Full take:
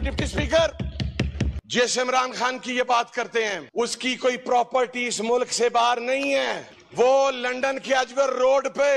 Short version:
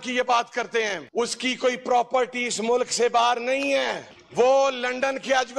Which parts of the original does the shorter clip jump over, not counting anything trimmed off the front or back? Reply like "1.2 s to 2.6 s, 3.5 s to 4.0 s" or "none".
none